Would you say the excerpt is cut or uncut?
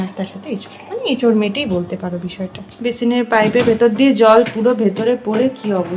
cut